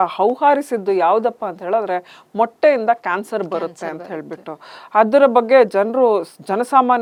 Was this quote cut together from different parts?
no; 0 cuts

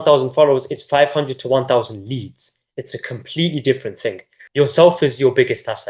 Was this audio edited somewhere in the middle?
yes; 1 cut; at 4.3 s

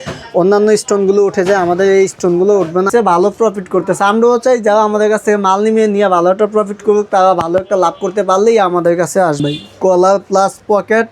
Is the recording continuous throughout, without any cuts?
no; 2 cuts; at 2.9 s, 9.4 s

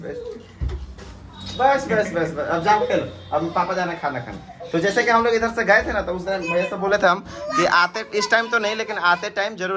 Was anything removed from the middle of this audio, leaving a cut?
no; 0 cuts

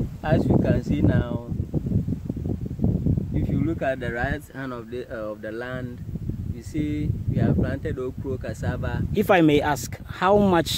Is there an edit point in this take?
yes; 1 cut; at 9.0 s

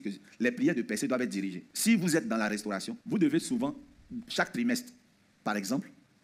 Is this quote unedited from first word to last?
no; 2 cuts; at 1.6 s, 2.9 s

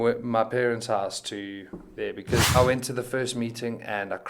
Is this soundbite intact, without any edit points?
no; 1 cut; at 2.6 s

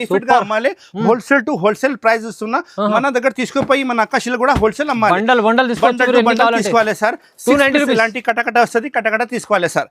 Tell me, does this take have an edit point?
no; 0 cuts

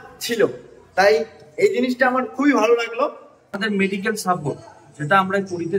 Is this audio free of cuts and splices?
no; 1 cut; at 3.5 s

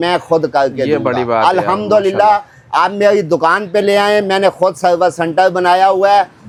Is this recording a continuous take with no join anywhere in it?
yes; 0 cuts

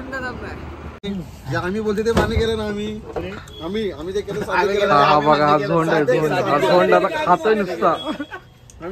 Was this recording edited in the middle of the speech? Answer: yes; 1 cut; at 1.0 s

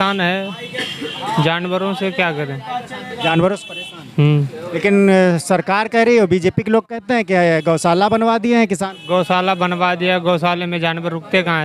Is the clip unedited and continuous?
yes; 0 cuts

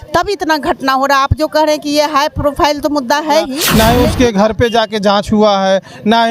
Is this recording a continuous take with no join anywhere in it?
no; 1 cut; at 3.6 s

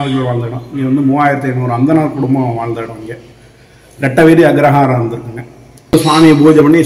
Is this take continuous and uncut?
no; 1 cut; at 5.9 s

